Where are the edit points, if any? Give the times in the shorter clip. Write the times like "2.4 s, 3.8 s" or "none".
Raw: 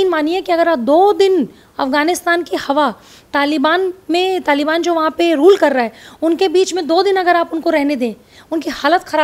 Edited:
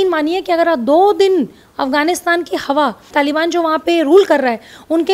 3.1 s